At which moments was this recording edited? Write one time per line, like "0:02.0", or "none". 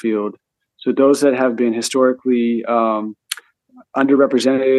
none